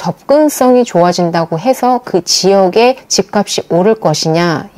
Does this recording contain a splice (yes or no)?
no